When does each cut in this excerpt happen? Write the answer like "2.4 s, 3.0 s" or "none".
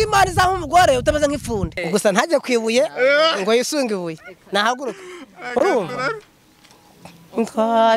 1.8 s